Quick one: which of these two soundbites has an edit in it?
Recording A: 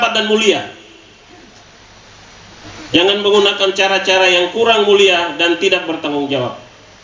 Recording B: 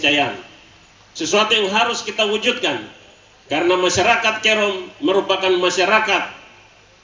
A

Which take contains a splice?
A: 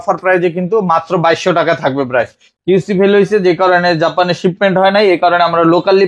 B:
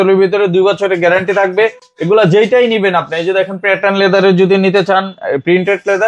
A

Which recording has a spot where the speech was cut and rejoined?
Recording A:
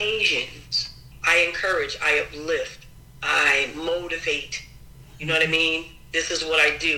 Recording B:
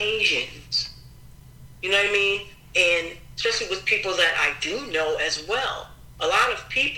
A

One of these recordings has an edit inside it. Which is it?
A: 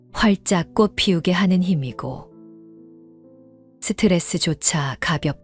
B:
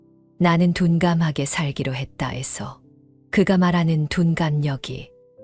A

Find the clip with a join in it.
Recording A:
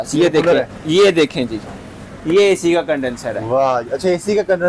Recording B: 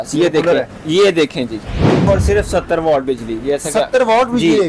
B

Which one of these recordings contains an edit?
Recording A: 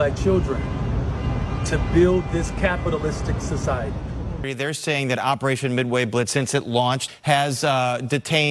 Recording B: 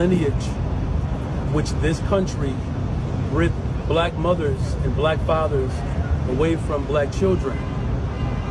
A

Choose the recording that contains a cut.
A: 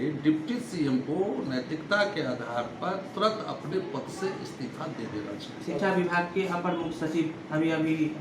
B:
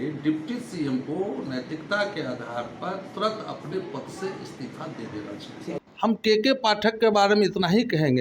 B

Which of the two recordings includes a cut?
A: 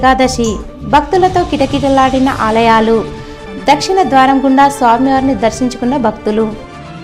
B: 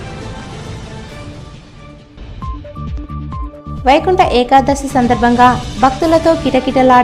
B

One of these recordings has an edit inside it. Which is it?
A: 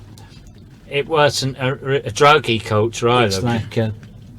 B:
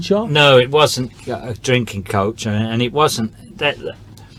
A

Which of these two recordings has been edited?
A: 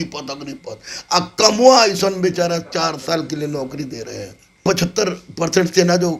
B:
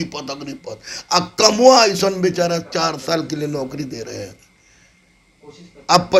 A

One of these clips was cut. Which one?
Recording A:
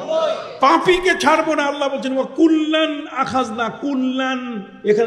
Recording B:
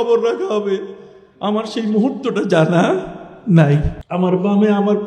B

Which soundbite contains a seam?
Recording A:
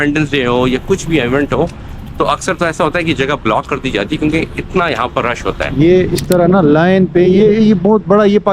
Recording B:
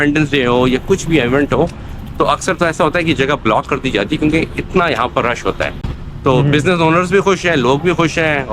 A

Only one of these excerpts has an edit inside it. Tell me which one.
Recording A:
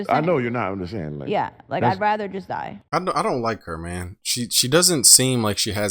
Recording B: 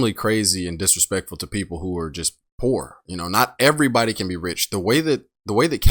A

